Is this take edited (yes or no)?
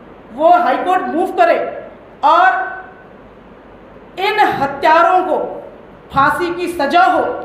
no